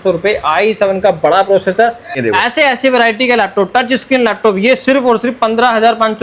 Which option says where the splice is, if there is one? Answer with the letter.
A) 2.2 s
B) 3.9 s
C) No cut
A